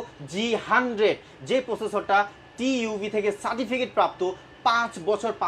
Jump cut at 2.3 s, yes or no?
no